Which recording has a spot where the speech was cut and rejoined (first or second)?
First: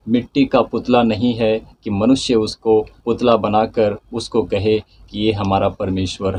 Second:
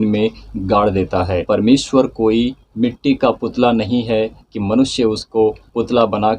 second